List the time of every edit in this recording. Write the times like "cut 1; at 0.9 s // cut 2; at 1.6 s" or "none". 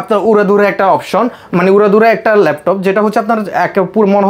none